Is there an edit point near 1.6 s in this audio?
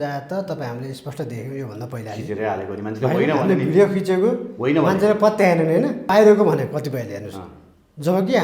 no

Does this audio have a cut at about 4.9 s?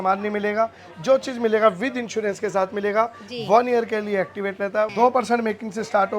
yes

